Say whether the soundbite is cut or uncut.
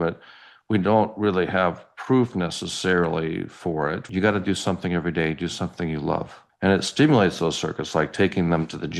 cut